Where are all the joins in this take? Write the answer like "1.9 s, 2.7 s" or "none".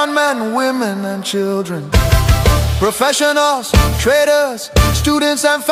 none